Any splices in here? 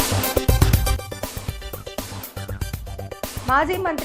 yes; 1 cut; at 3.0 s

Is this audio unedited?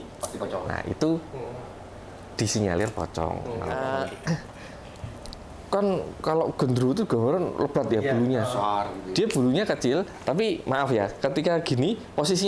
no; 1 cut; at 3.8 s

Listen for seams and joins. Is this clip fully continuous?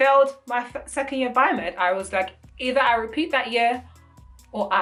yes; 0 cuts

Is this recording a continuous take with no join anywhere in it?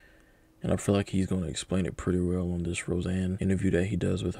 no; 1 cut; at 3.4 s

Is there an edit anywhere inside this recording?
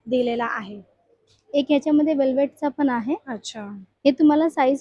no; 0 cuts

